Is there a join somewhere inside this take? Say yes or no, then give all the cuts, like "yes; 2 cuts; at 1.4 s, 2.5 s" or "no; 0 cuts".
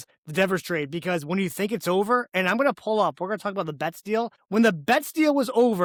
no; 0 cuts